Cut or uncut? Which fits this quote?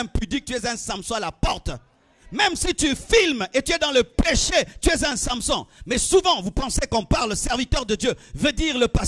uncut